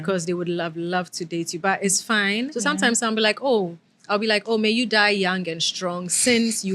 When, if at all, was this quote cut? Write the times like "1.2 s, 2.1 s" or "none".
2.5 s